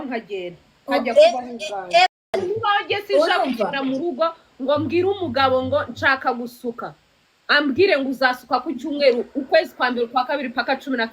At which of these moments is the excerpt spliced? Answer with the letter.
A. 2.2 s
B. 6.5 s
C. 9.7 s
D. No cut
A